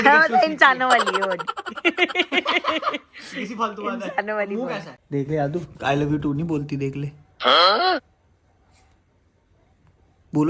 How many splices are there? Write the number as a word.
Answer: one